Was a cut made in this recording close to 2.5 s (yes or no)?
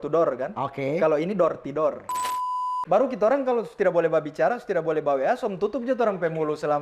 yes